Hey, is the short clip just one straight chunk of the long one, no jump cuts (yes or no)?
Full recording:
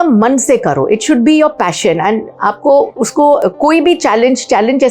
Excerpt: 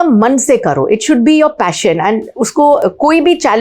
no